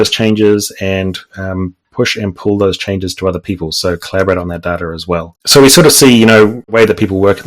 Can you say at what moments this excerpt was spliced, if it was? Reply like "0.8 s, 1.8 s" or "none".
5.4 s, 6.7 s